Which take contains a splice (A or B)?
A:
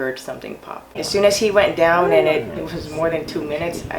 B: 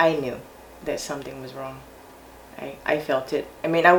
A